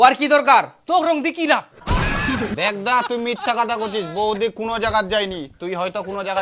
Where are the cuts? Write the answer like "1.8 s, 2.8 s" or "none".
2.5 s